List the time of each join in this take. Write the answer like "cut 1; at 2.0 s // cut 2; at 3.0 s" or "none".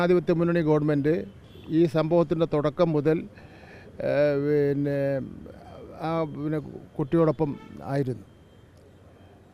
none